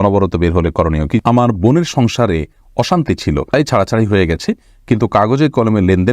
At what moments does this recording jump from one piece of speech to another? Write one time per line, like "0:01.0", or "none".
0:01.2
0:03.5

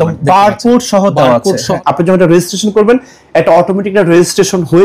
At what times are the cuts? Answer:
0:01.8

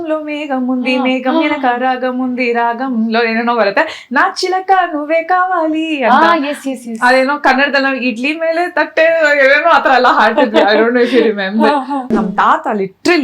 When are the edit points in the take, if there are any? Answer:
0:12.1

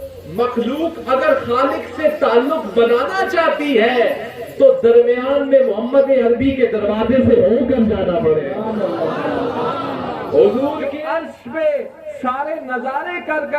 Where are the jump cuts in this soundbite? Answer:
0:11.3

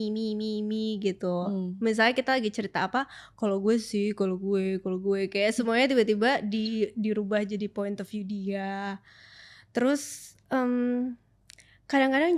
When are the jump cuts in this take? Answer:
none

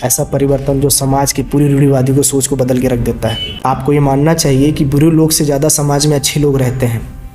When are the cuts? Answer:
0:03.5

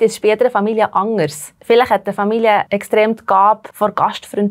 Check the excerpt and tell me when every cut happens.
0:01.5
0:02.7
0:03.7

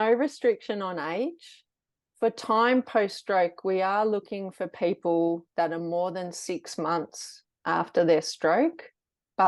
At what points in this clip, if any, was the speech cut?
none

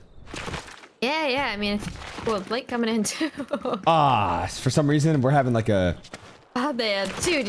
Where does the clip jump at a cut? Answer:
none

